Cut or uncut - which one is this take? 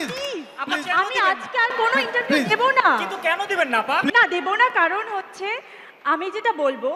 uncut